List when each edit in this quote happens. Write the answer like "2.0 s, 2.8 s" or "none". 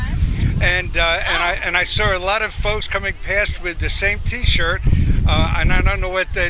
3.8 s